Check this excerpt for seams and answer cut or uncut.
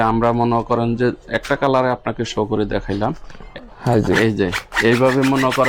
cut